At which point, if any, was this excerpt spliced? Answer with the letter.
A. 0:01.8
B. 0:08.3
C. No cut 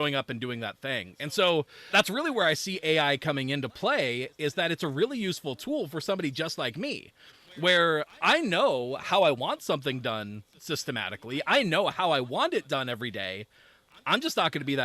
A